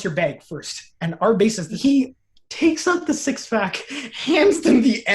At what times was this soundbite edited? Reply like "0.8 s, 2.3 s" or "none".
1.7 s